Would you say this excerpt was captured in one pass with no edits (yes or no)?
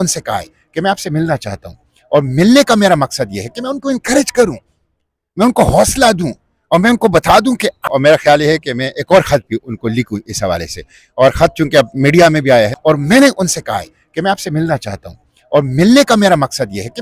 no